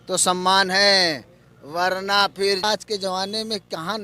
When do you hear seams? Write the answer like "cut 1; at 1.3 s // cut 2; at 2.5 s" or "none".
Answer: cut 1; at 2.6 s